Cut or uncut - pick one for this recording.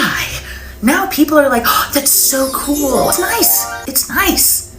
cut